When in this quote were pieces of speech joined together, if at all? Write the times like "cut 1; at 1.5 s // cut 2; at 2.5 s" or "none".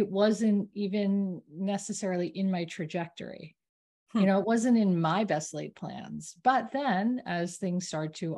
none